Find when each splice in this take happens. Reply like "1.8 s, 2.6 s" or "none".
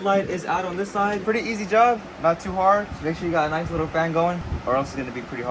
1.2 s, 4.5 s